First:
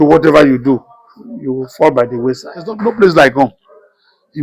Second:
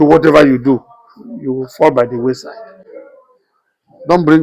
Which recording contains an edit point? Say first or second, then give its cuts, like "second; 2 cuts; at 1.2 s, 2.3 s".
first; 1 cut; at 2.7 s